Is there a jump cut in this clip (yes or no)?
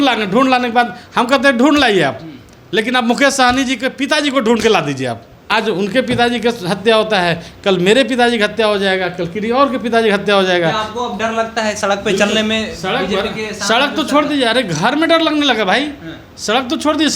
yes